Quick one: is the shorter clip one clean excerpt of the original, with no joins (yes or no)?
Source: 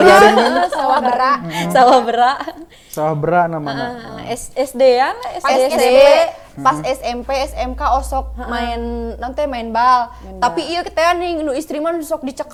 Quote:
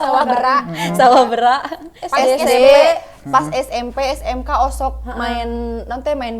no